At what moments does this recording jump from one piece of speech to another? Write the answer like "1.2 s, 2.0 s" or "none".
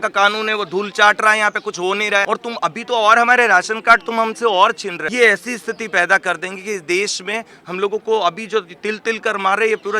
2.2 s, 5.0 s